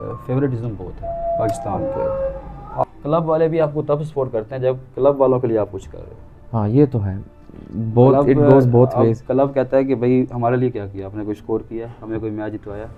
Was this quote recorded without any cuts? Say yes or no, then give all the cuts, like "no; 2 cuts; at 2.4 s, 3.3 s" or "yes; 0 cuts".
no; 1 cut; at 2.8 s